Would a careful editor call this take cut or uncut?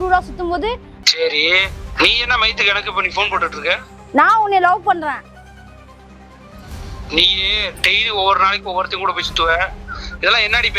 cut